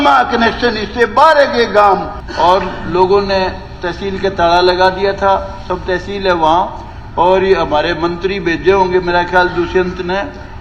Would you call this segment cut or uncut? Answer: cut